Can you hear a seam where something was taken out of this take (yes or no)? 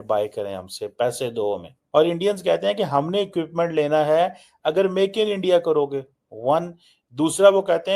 yes